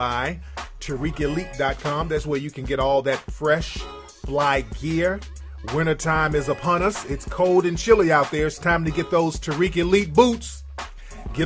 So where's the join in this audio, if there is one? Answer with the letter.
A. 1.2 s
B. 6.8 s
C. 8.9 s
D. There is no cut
A